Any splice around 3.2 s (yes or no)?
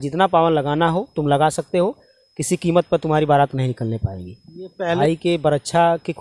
no